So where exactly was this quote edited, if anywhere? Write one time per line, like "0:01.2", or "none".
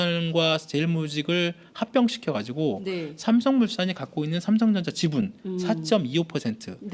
0:02.5